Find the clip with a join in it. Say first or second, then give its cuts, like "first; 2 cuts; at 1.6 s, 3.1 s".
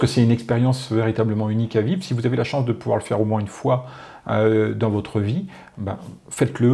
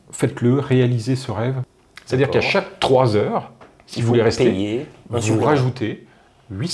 second; 1 cut; at 1.7 s